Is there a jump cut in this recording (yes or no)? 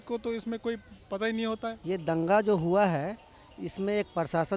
yes